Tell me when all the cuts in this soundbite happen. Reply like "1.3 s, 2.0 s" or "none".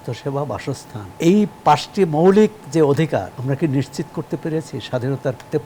1.0 s, 3.3 s